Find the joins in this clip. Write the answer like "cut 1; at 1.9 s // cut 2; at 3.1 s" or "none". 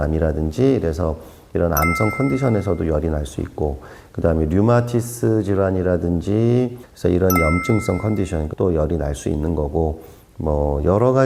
none